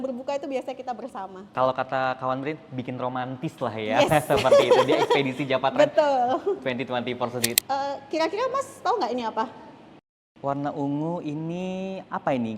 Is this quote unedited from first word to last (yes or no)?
no